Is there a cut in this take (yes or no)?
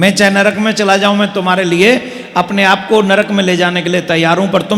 no